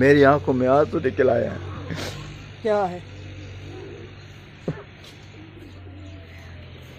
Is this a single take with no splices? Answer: yes; 0 cuts

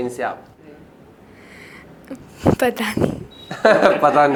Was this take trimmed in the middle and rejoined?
no; 0 cuts

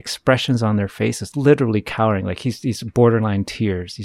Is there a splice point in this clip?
yes; 1 cut; at 1.3 s

